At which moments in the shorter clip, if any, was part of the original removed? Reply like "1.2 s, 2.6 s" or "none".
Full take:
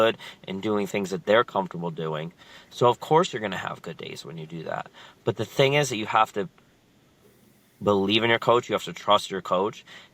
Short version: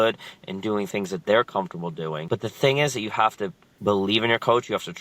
2.2 s, 3.7 s